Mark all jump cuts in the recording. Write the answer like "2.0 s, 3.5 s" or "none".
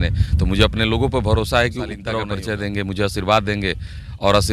2.2 s